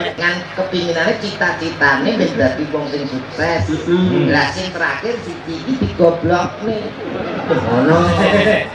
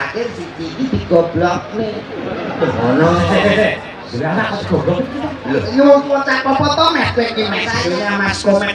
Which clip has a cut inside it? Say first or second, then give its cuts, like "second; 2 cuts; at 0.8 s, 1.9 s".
second; 1 cut; at 7.7 s